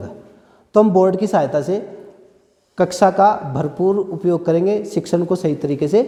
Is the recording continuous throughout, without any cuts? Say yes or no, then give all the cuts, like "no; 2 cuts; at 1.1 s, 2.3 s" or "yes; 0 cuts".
yes; 0 cuts